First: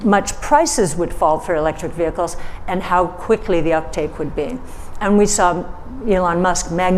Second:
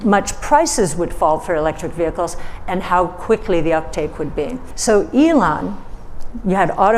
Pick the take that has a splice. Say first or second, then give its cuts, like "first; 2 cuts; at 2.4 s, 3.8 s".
second; 1 cut; at 4.6 s